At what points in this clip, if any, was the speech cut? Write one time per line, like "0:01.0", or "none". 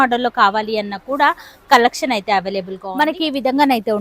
0:03.1